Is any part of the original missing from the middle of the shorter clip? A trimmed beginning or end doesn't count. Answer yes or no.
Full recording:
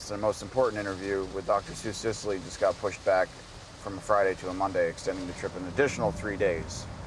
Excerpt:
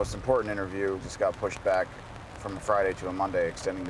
yes